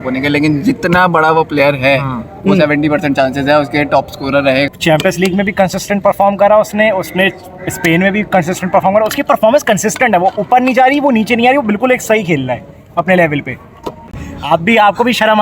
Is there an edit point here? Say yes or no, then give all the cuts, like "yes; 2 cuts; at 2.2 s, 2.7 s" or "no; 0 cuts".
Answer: yes; 2 cuts; at 4.7 s, 14.0 s